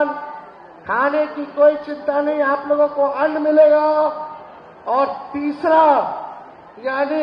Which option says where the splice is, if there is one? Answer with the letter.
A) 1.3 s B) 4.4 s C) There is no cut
C